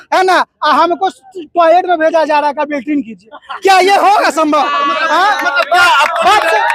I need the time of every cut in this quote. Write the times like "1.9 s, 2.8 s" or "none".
none

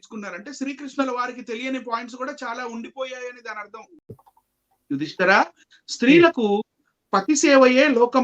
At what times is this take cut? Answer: 4.2 s

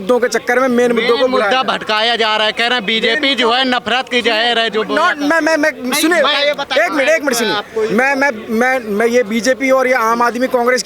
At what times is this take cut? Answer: none

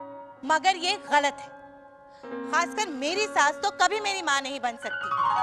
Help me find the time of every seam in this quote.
none

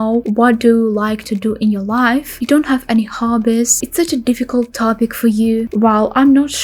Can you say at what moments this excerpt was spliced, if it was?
none

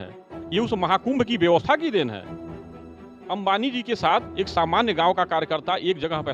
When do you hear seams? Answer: none

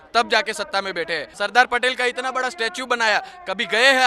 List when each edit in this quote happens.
1.3 s

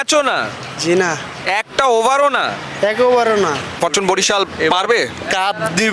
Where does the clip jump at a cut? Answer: 3.8 s

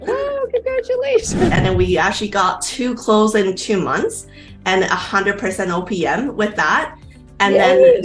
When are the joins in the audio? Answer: 1.5 s

